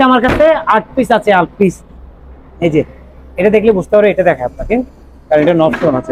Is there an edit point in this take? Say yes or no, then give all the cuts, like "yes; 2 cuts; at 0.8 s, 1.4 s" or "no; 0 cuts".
no; 0 cuts